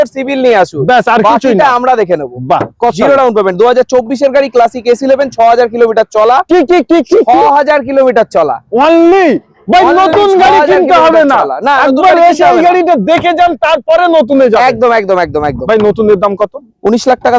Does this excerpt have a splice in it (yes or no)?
no